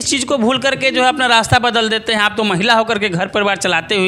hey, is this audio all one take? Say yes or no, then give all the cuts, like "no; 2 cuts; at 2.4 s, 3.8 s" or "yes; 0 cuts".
yes; 0 cuts